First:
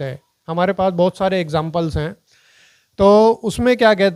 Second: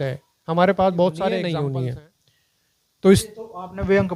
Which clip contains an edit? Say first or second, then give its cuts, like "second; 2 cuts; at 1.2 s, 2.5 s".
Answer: second; 1 cut; at 1.4 s